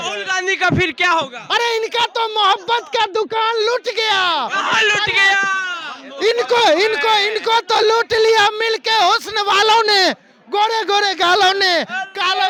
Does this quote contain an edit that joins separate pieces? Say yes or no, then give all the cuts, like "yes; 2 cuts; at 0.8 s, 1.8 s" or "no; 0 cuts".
no; 0 cuts